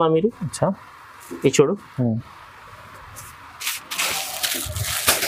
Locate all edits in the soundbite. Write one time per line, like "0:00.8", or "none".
none